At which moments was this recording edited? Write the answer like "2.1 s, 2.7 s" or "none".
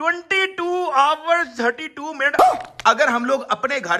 none